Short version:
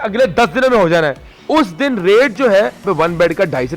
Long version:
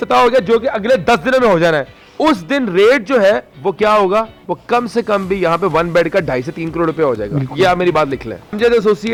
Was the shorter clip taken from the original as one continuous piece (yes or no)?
no